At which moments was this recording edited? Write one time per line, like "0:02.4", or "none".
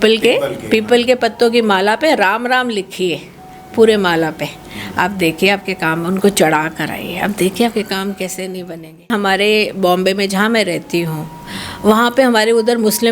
0:09.1